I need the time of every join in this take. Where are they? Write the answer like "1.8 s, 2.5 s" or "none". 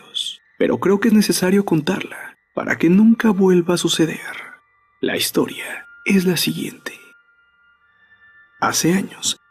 none